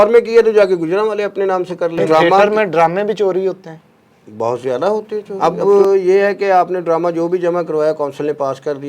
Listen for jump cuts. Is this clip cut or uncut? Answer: cut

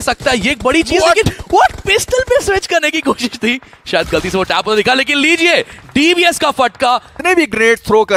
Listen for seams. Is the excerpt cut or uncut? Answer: uncut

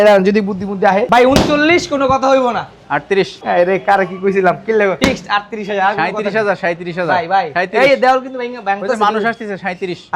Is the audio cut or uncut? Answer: cut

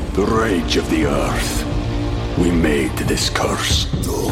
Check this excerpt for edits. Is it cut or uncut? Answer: uncut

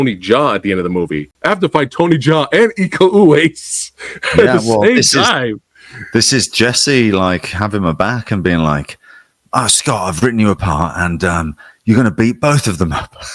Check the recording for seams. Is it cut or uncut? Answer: cut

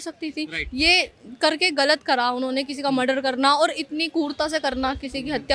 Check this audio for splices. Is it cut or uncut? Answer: uncut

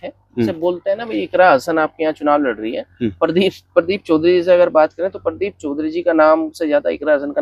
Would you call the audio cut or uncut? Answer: uncut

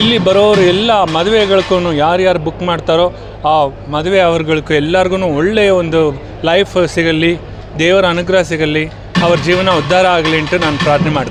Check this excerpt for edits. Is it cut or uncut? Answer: uncut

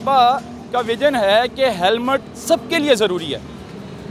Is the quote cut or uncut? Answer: uncut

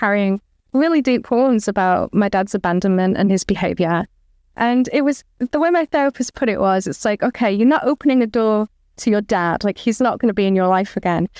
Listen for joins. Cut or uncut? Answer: uncut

